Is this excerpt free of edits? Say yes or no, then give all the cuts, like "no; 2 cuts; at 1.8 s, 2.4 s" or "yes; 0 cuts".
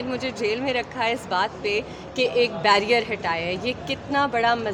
yes; 0 cuts